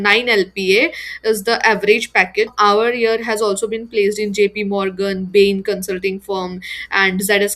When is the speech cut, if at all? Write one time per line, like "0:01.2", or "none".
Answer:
0:02.5